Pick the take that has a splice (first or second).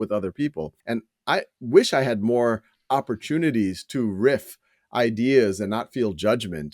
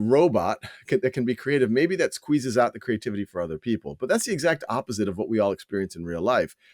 first